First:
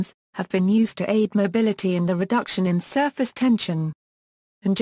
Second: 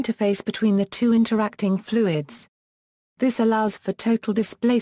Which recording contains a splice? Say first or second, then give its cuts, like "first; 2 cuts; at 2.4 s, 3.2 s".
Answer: first; 1 cut; at 1.8 s